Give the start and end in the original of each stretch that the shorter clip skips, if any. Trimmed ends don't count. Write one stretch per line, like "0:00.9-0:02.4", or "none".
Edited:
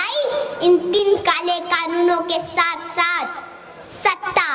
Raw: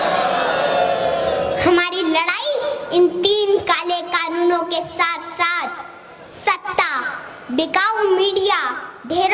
0:03.3-0:03.4